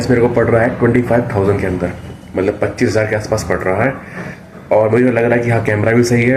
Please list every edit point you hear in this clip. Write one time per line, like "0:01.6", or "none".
none